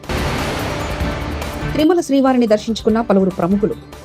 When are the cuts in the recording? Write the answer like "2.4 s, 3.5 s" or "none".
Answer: 1.6 s